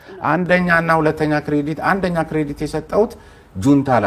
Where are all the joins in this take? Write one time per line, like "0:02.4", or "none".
none

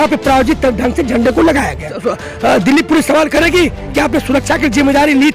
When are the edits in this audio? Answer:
0:01.9

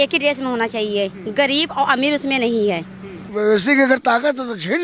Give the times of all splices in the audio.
0:03.2

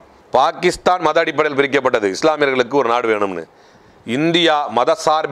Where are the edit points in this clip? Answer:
none

